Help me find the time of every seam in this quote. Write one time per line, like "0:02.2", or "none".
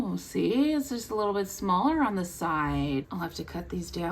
0:03.1